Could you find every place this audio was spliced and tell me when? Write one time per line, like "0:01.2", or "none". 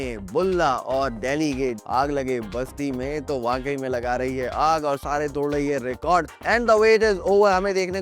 0:01.8
0:06.4